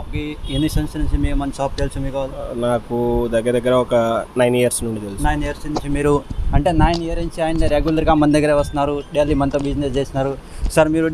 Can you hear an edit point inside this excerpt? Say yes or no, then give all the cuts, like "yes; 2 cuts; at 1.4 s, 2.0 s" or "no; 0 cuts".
no; 0 cuts